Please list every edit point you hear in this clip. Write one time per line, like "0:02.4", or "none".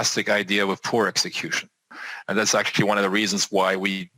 0:01.9